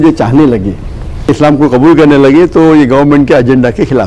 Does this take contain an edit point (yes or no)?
yes